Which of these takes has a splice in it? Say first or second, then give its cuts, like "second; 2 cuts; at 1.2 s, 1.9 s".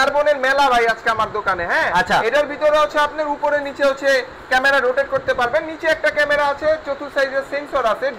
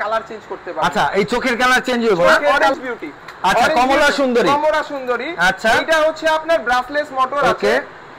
second; 1 cut; at 2.5 s